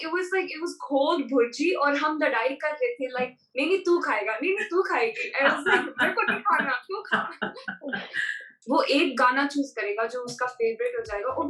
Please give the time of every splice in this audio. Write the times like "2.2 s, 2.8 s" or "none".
8.5 s